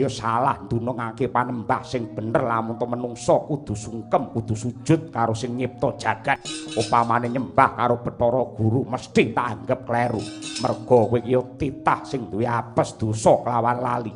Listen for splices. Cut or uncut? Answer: cut